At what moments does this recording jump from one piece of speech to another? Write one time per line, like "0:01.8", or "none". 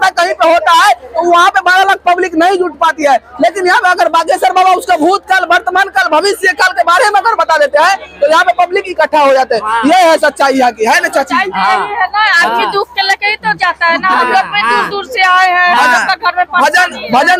none

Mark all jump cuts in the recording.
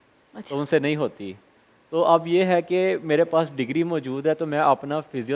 none

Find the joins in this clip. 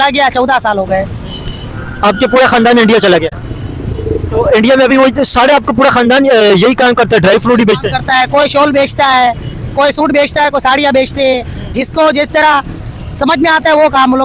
none

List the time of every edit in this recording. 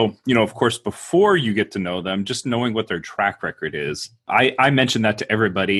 0:04.3

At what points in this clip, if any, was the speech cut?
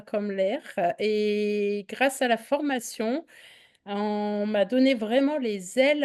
none

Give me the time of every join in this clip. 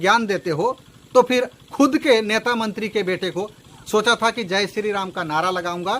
0:03.6

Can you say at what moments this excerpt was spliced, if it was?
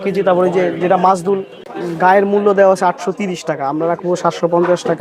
0:01.6

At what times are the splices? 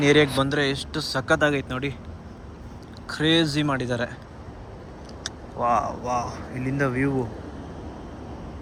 none

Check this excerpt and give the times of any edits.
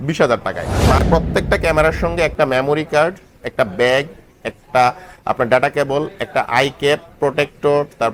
0:01.0

